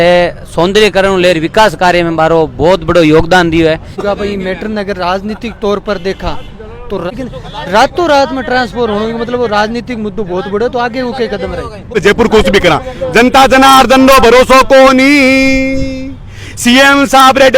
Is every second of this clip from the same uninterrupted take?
no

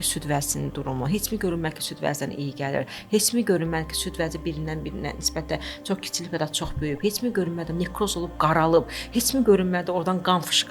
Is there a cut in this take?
no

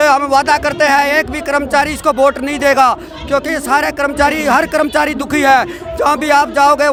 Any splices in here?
no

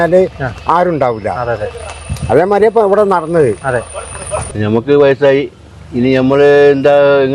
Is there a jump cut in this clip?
yes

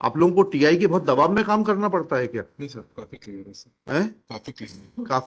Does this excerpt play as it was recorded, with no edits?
yes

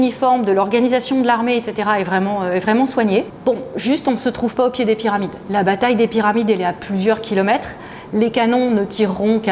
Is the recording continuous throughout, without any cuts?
no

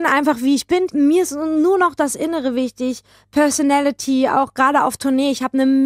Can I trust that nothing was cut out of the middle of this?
no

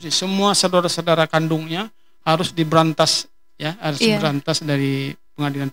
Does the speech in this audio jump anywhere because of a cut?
no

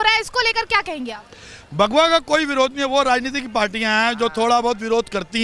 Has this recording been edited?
no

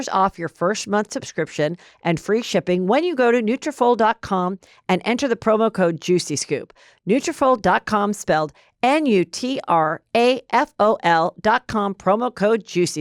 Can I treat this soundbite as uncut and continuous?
yes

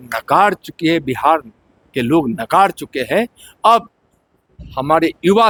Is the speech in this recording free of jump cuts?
yes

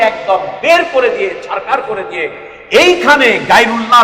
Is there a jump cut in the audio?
no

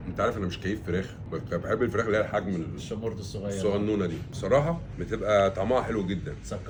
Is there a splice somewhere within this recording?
no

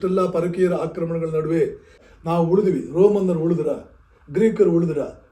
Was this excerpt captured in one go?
no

